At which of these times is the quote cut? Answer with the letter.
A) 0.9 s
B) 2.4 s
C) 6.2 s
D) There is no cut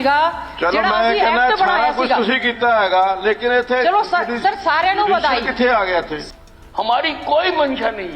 C